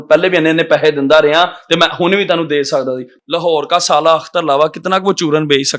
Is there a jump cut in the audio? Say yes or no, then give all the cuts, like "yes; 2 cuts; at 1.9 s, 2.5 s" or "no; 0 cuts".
yes; 1 cut; at 3.1 s